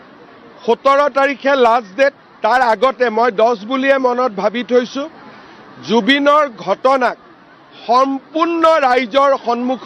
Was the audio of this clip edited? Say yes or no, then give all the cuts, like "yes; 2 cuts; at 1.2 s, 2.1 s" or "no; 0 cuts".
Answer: no; 0 cuts